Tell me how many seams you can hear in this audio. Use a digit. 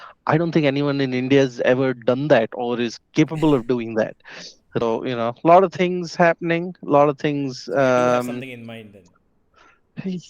1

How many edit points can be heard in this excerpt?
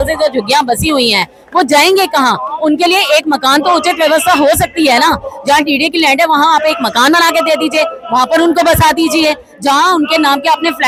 0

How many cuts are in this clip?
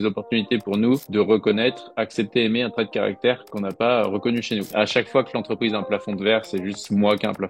1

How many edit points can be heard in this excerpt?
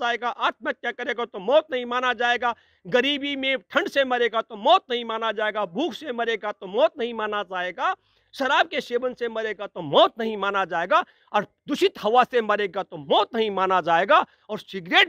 0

